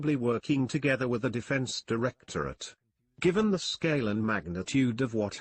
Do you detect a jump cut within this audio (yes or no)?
yes